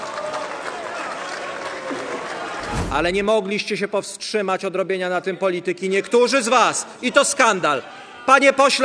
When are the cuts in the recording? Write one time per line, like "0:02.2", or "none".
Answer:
0:02.8

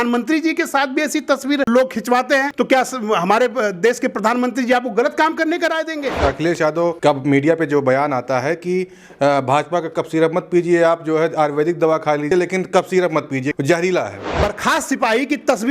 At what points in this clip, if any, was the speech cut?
0:01.7
0:02.5
0:06.1
0:14.3

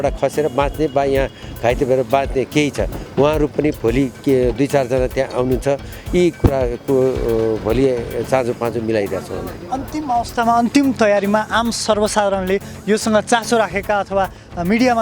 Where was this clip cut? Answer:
none

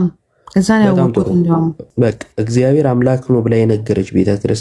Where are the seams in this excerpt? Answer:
0:01.8

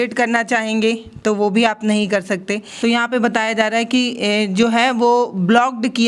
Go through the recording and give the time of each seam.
0:02.8

